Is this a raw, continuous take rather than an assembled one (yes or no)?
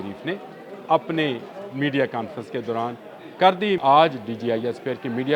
no